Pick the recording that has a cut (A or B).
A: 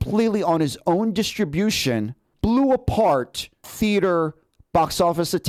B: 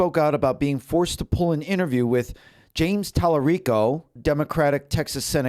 B